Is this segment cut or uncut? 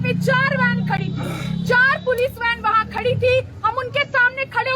uncut